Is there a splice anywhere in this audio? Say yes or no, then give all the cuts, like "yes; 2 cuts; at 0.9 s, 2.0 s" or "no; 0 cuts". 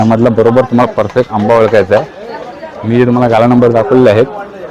no; 0 cuts